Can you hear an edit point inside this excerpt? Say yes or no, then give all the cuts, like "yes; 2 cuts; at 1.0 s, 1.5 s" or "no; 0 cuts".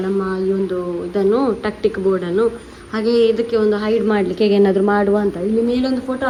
no; 0 cuts